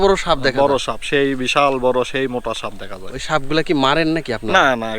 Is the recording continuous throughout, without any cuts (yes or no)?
yes